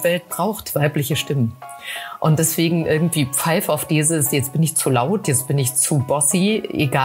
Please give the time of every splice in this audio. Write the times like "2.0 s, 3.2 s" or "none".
none